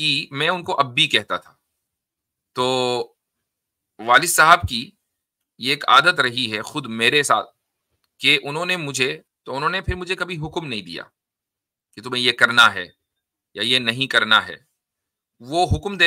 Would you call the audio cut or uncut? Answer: cut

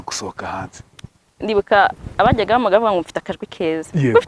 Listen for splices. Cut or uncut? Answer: cut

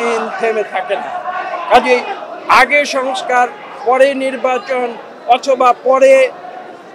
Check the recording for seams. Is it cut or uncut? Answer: uncut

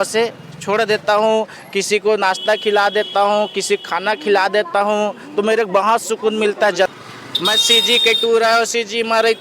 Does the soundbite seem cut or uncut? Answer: cut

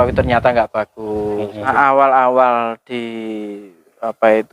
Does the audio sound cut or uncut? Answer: cut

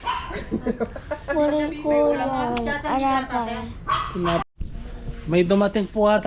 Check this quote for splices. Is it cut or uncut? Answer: cut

